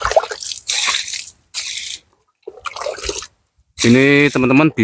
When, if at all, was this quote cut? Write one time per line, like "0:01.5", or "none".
none